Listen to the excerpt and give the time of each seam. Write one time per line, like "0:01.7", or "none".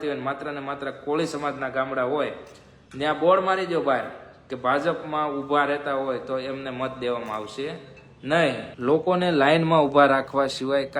0:08.7